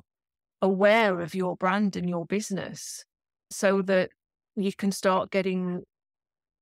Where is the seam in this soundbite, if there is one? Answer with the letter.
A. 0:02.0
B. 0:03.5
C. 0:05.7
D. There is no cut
B